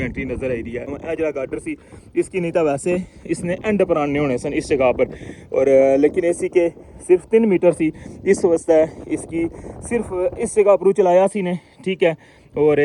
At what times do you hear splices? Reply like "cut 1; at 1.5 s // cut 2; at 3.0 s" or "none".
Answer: cut 1; at 0.9 s